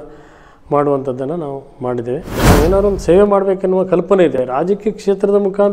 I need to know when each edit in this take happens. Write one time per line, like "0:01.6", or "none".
0:02.4
0:04.4